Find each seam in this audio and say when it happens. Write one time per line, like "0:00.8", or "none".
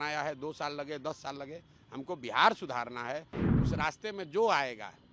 0:03.4

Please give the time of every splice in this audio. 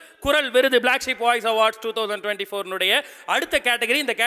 none

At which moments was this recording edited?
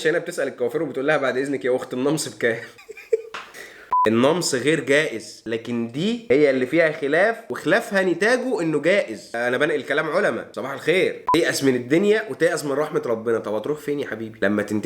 0:03.9
0:11.2

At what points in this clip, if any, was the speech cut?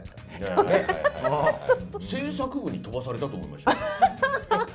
0:01.9

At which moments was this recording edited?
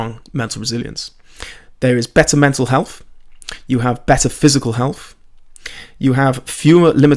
none

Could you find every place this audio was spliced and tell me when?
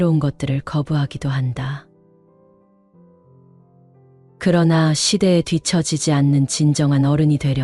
0:01.8
0:04.2

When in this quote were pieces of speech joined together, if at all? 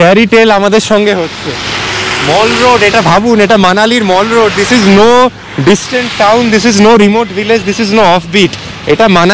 none

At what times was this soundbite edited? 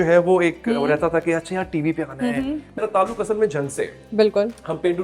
0:02.7

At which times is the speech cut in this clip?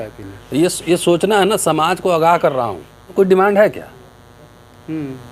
0:03.1

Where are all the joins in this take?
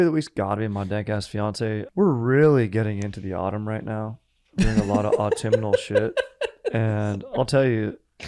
0:01.9

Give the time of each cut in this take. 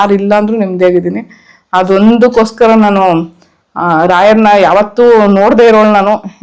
none

